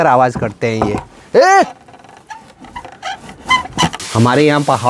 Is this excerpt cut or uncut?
cut